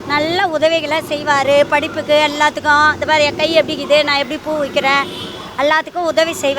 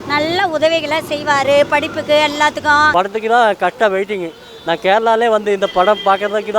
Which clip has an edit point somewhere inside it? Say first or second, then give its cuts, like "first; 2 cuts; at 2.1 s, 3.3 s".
second; 1 cut; at 2.9 s